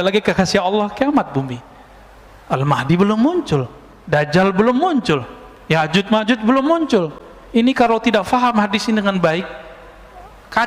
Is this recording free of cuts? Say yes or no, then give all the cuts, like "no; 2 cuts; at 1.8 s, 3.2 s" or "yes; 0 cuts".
yes; 0 cuts